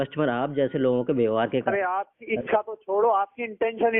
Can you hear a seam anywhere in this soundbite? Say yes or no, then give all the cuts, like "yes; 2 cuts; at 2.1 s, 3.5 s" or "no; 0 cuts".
no; 0 cuts